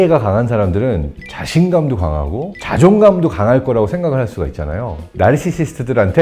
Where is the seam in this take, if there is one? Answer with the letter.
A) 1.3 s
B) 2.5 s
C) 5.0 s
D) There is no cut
C